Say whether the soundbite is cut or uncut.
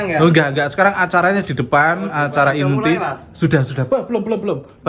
uncut